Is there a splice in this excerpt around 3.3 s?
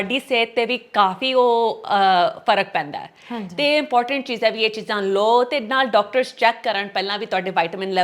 no; 0 cuts

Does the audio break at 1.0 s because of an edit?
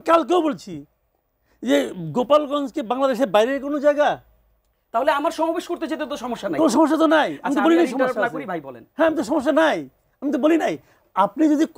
no; 0 cuts

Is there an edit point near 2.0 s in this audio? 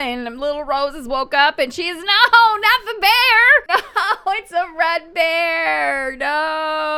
no; 0 cuts

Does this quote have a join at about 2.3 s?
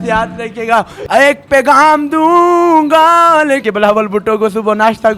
no; 2 cuts; at 1.1 s, 3.6 s

